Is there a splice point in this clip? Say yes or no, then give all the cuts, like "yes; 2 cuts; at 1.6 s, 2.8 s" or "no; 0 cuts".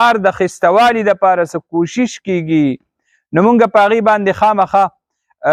no; 0 cuts